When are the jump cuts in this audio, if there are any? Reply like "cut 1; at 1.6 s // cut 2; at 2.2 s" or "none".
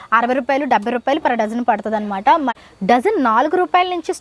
cut 1; at 2.6 s